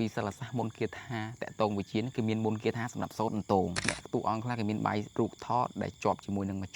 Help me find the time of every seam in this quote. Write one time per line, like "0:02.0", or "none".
0:03.9
0:05.1